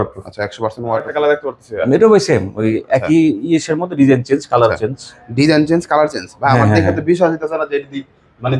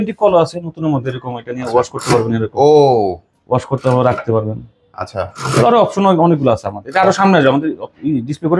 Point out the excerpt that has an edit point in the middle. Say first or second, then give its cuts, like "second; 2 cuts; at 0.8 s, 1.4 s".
first; 1 cut; at 1.1 s